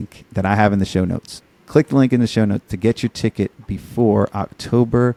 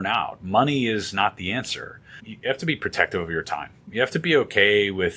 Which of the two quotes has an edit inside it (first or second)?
second